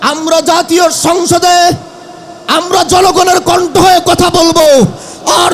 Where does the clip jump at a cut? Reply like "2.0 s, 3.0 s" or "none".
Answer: none

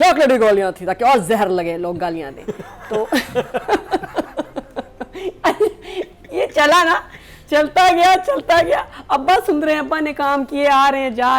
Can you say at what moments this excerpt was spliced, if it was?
none

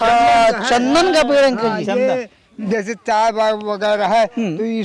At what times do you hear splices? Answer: 2.5 s

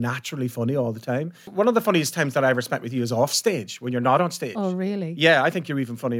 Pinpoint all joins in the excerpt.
1.4 s

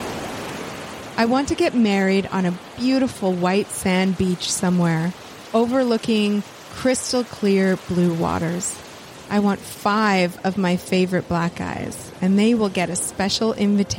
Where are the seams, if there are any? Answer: 1.1 s

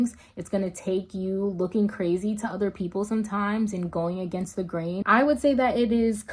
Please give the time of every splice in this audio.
5.0 s

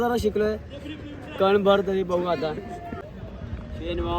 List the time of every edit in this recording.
3.1 s

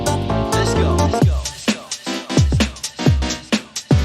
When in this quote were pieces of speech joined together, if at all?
1.9 s

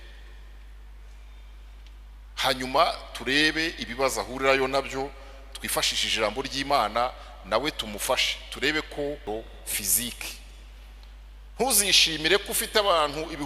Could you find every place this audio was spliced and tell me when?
9.2 s

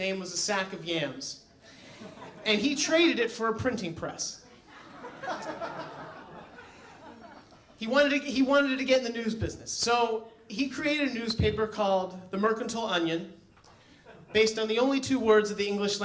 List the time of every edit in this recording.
5.8 s

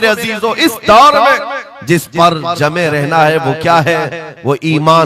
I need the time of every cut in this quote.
none

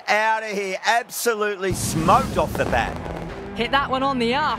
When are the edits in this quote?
3.5 s

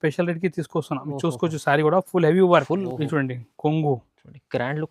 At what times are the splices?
2.8 s

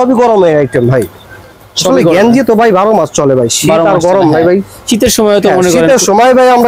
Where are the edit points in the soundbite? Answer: none

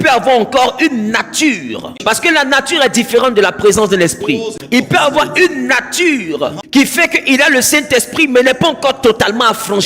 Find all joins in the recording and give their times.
2.0 s, 4.6 s, 6.6 s

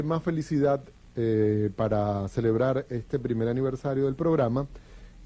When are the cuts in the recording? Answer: 3.9 s

